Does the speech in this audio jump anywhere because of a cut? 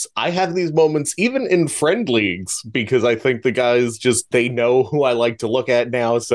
yes; 1 cut; at 4.2 s

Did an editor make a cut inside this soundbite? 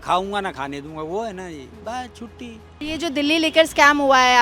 no; 0 cuts

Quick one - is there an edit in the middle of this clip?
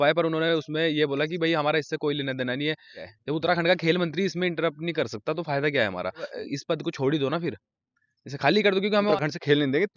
yes; 3 cuts; at 3.0 s, 6.3 s, 9.1 s

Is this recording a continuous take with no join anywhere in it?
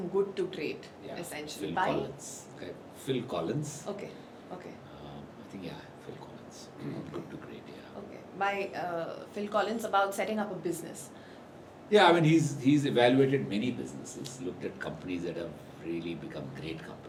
yes; 0 cuts

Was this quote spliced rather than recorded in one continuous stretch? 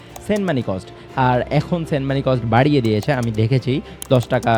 no; 0 cuts

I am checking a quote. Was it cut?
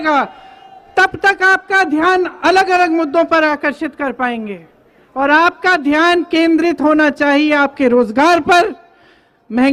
no; 0 cuts

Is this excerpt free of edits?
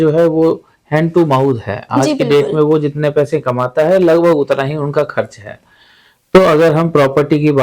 yes; 0 cuts

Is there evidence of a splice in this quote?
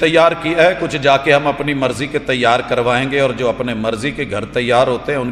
no; 0 cuts

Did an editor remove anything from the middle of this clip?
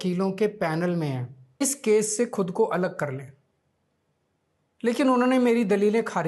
yes; 1 cut; at 1.6 s

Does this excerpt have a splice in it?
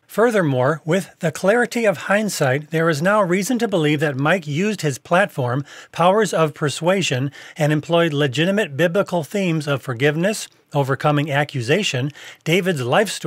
no; 0 cuts

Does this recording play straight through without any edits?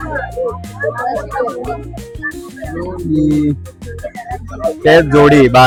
yes; 0 cuts

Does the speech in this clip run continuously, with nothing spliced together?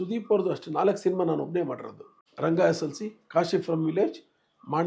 yes; 0 cuts

